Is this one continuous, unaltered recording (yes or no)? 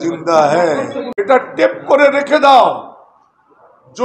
no